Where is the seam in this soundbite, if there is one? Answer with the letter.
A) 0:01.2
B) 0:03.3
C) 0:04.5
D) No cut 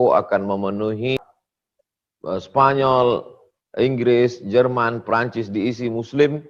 A